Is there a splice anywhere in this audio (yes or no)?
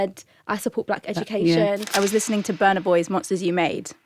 yes